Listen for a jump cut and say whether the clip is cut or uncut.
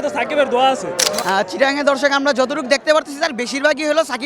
cut